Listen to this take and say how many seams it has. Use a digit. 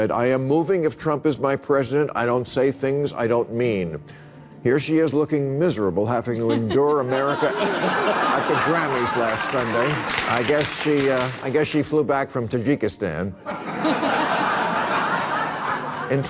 1